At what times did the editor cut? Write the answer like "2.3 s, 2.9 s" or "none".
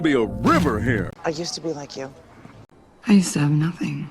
1.1 s